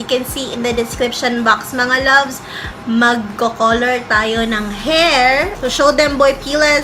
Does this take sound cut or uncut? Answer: cut